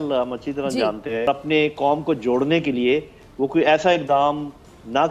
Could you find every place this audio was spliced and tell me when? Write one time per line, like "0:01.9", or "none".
0:01.3